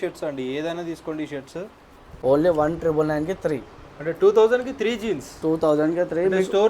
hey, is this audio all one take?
no; 1 cut; at 2.0 s

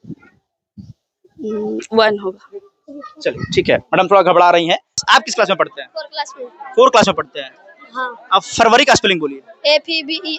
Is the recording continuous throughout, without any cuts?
no; 1 cut; at 5.0 s

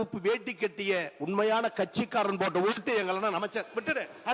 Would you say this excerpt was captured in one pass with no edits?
yes; 0 cuts

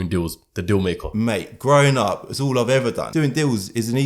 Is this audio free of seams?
no; 2 cuts; at 1.0 s, 3.0 s

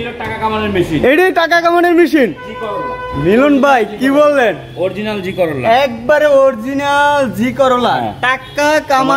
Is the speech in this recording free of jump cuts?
yes; 0 cuts

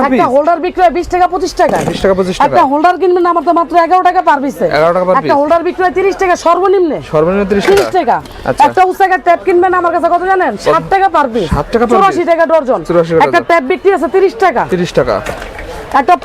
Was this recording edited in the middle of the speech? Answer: no; 0 cuts

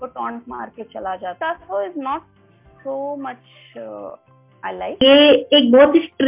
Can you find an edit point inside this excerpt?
yes; 2 cuts; at 1.4 s, 5.0 s

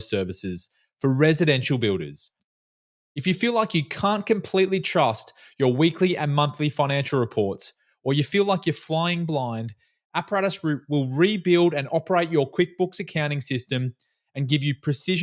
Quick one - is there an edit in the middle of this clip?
no; 0 cuts

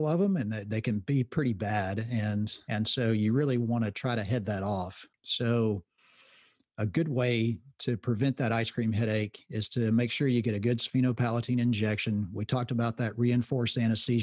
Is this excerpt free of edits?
yes; 0 cuts

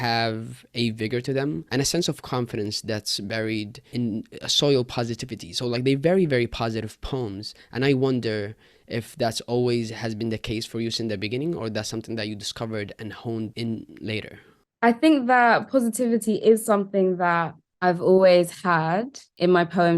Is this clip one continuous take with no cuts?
no; 3 cuts; at 1.6 s, 3.8 s, 13.5 s

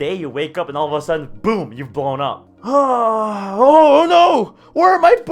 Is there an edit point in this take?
yes; 1 cut; at 2.5 s

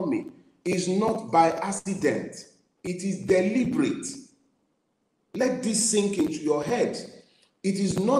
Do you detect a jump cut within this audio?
no; 0 cuts

